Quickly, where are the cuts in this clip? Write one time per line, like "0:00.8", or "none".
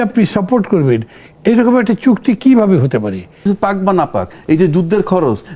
0:03.5